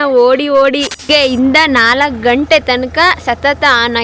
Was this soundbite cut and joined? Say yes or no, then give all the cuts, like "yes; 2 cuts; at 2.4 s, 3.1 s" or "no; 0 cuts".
yes; 1 cut; at 1.0 s